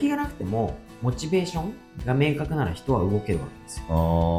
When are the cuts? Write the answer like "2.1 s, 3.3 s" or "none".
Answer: none